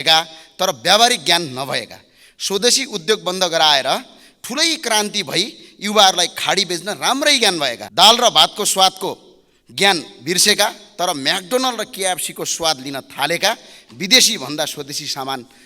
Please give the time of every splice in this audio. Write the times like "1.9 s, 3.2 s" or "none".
7.8 s